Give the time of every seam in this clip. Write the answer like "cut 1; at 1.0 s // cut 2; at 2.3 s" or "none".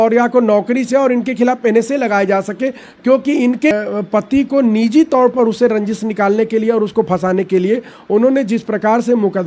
cut 1; at 3.7 s